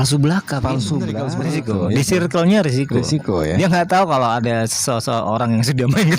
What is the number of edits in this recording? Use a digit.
1